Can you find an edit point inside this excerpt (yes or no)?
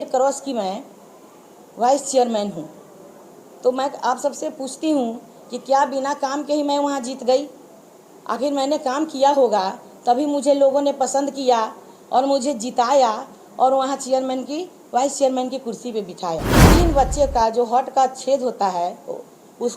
yes